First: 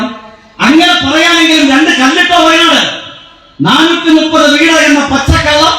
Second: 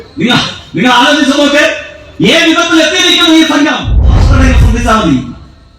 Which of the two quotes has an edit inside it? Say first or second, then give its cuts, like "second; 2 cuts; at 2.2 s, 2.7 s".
second; 1 cut; at 4.1 s